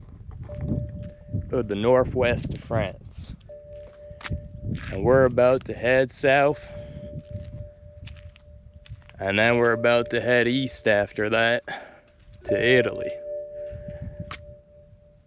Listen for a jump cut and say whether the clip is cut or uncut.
uncut